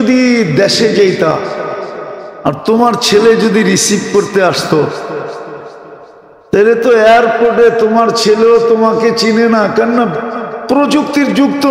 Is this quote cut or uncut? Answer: uncut